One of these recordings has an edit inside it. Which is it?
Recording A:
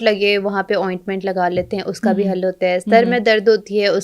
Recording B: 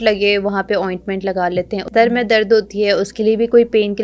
B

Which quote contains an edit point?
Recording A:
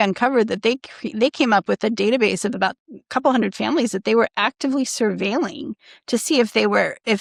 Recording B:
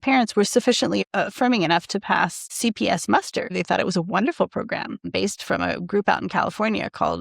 B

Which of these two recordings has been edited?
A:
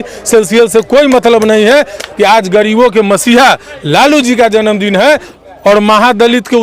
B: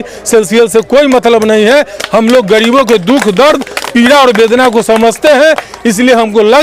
A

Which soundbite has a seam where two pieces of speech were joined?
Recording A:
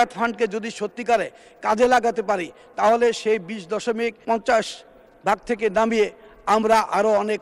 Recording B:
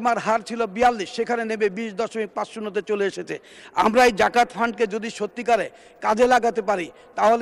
A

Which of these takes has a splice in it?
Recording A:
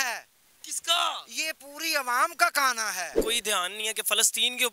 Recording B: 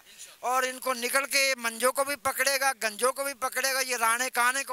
A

